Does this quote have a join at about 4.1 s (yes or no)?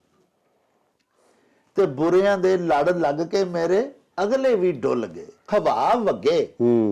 no